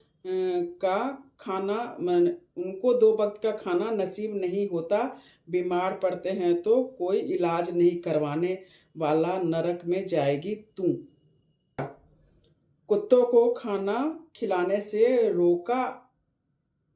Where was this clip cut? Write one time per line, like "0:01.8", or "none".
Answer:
0:11.8

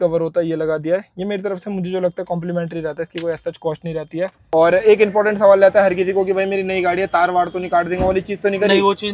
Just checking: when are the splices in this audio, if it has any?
0:04.4

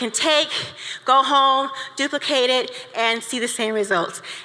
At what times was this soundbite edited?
none

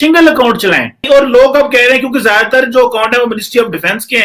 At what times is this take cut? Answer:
0:01.0

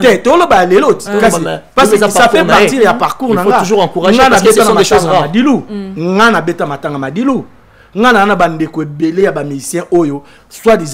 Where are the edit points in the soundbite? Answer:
none

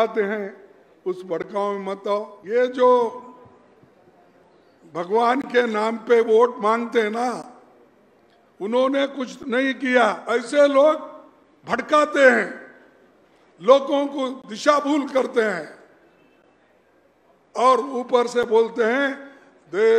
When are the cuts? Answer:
0:02.4
0:10.2

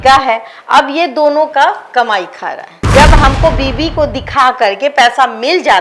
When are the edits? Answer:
0:02.7

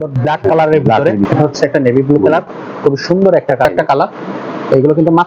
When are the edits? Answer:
0:01.3
0:03.7

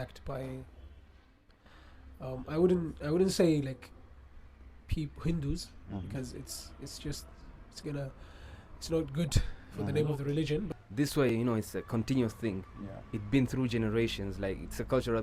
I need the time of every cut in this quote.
0:10.7

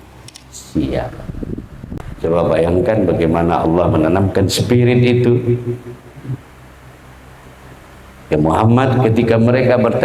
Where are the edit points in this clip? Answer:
0:01.8

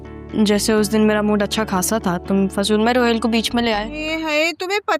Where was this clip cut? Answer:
0:04.0

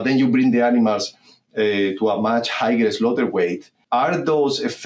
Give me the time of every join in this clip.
0:03.7

